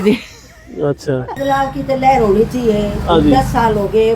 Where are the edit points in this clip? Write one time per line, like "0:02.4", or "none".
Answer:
0:01.3